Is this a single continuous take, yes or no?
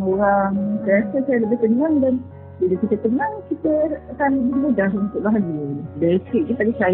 yes